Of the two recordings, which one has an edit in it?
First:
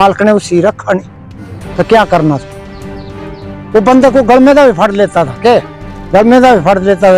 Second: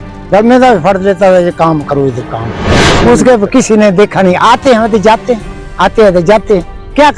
second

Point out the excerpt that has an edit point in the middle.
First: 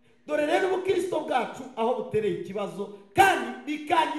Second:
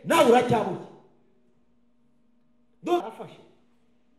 second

